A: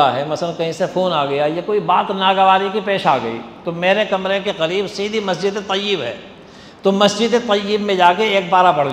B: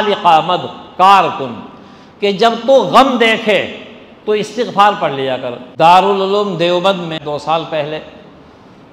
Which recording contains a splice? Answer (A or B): B